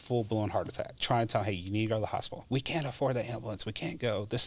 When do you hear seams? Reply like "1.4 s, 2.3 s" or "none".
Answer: 1.0 s, 2.3 s

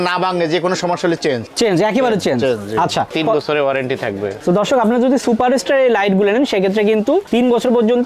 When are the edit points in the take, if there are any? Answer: 3.1 s

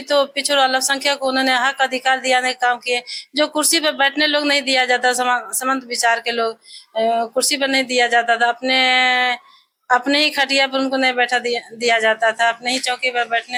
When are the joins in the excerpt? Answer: none

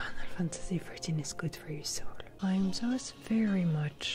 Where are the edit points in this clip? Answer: 2.3 s

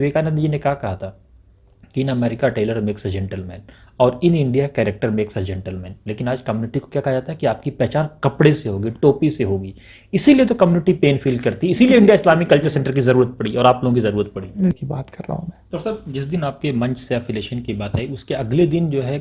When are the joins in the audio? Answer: 14.7 s

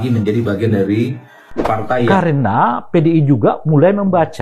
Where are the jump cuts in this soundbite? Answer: 2.1 s

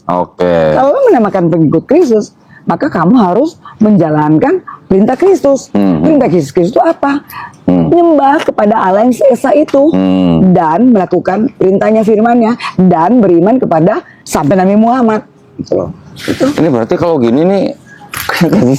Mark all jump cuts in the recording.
none

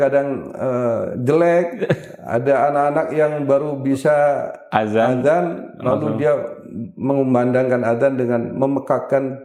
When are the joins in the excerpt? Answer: none

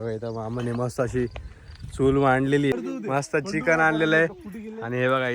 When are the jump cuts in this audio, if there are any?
2.7 s

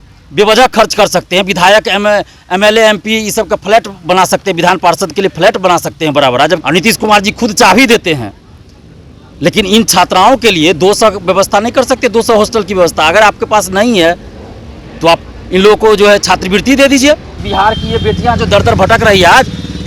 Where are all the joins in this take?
6.6 s, 17.4 s

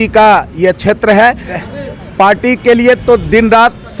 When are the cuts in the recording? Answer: 1.5 s

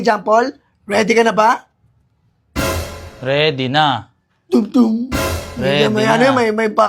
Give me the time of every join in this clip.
none

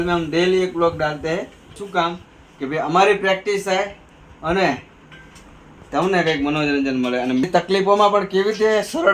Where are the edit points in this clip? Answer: 1.7 s, 7.5 s

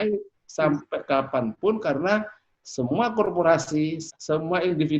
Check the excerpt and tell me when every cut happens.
4.1 s

